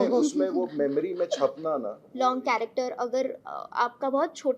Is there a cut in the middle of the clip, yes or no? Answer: yes